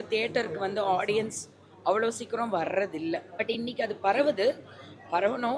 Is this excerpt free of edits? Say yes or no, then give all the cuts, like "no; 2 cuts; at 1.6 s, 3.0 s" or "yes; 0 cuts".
no; 1 cut; at 3.4 s